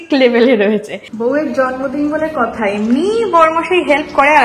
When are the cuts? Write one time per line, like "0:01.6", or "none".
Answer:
0:01.0